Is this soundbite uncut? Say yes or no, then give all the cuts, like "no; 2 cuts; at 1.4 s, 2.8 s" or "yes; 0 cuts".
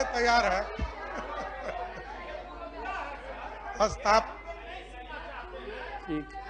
yes; 0 cuts